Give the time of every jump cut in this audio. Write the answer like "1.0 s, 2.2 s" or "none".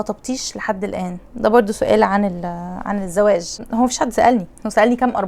3.6 s